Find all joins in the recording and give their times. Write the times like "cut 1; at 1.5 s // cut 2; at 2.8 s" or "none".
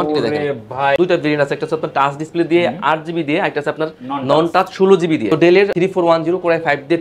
cut 1; at 1.0 s // cut 2; at 5.7 s